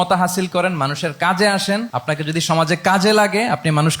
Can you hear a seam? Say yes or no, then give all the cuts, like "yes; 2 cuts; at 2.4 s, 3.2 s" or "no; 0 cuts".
yes; 1 cut; at 1.9 s